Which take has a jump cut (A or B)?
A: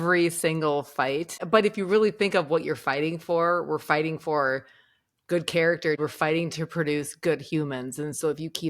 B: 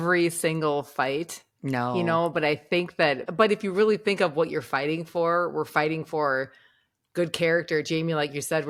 A